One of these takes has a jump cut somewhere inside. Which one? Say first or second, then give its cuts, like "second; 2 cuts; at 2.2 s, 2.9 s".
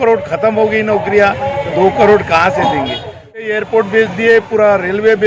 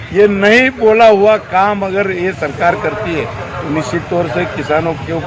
first; 1 cut; at 3.5 s